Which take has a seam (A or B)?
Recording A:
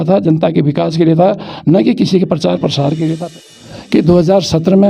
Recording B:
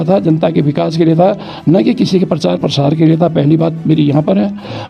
A